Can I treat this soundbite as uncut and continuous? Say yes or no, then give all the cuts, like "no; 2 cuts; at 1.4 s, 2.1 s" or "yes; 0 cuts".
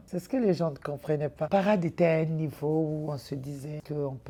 yes; 0 cuts